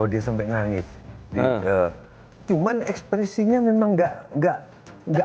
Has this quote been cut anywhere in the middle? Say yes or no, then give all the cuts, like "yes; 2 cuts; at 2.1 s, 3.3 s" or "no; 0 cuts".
no; 0 cuts